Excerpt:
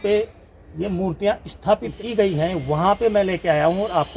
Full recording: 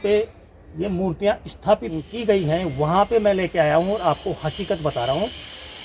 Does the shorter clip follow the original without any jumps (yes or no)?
no